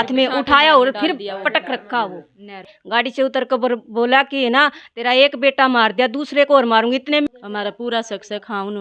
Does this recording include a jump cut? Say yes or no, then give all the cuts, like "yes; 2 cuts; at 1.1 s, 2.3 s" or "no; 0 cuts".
yes; 2 cuts; at 2.8 s, 7.3 s